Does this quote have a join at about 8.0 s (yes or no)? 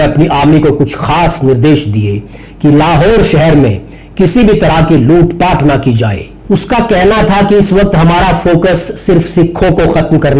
no